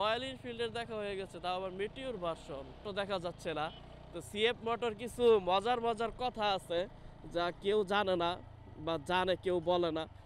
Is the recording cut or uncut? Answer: cut